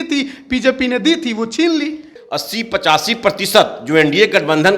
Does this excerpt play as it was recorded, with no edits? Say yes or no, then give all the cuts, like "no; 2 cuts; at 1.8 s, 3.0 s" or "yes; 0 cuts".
no; 1 cut; at 2.1 s